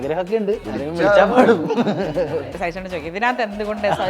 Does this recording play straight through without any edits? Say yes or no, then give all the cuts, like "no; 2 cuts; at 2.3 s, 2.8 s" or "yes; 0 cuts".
no; 1 cut; at 2.5 s